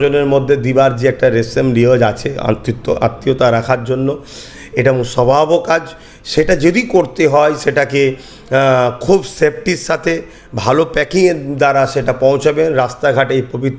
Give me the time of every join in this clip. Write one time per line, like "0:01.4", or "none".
none

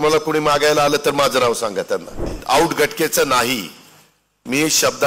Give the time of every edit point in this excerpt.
0:02.3

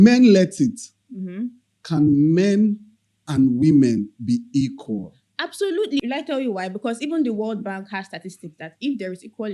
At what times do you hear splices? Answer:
0:06.0

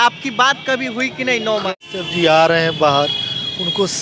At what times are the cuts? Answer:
0:01.7

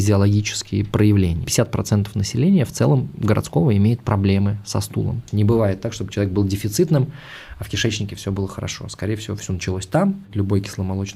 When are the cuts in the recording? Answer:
0:01.5
0:05.2
0:10.3

